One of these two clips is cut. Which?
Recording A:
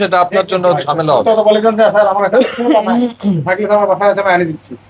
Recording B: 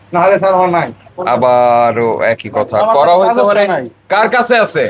B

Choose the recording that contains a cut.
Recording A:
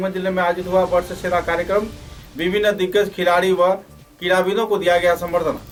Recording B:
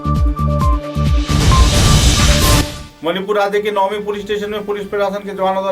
B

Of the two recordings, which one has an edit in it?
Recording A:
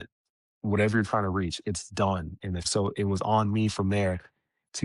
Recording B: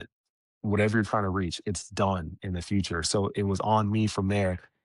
A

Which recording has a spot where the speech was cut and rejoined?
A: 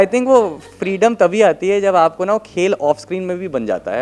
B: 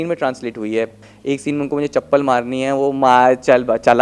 B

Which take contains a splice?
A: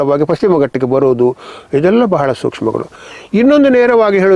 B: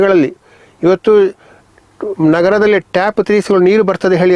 A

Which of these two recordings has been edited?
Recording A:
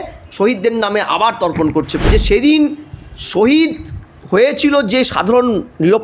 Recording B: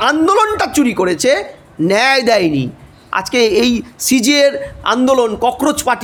A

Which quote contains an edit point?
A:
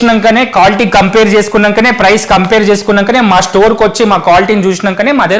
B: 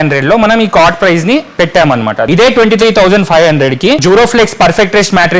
B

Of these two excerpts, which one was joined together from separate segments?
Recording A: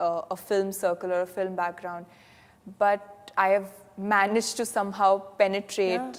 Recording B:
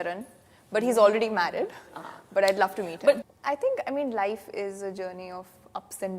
B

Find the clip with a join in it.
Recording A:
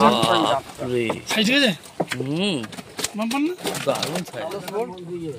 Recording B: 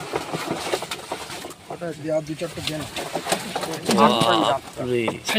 A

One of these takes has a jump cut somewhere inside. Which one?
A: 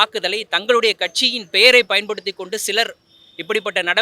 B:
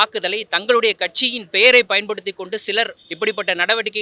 B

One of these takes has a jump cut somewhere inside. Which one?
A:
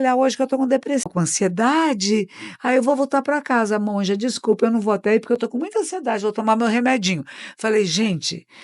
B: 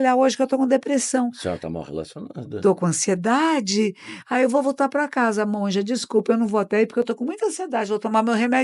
A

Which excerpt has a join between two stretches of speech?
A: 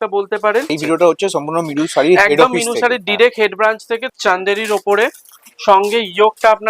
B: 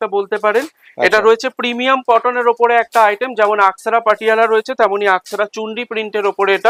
A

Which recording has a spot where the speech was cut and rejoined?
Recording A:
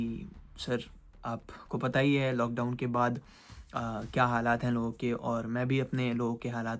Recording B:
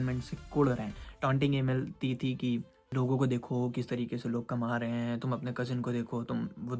B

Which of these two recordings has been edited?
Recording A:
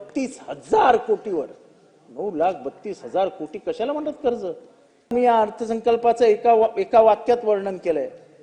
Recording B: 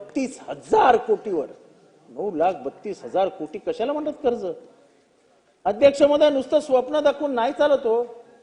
A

